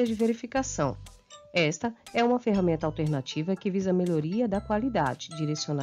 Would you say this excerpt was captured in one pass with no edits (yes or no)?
yes